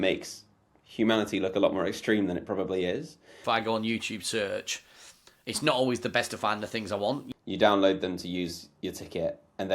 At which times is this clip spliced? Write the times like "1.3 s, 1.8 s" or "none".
3.3 s, 7.3 s